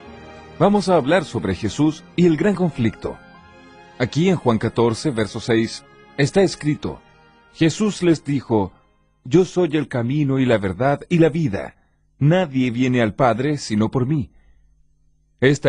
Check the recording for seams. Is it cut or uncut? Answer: uncut